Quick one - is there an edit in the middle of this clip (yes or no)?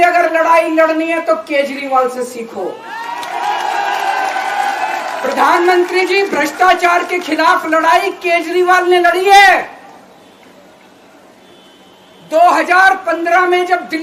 no